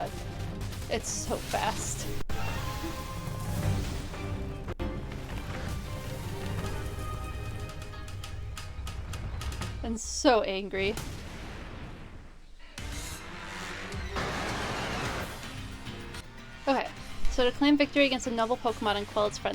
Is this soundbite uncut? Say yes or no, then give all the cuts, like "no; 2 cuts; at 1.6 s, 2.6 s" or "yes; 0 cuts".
no; 1 cut; at 16.2 s